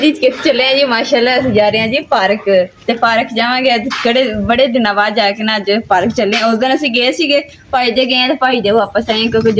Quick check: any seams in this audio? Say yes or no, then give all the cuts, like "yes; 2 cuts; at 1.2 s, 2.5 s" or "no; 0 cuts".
no; 0 cuts